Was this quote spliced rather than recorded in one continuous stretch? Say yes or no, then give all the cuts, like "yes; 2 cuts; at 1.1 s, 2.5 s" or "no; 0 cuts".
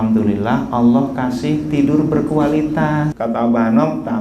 yes; 1 cut; at 3.1 s